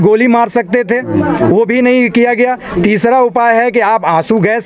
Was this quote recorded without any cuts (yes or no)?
yes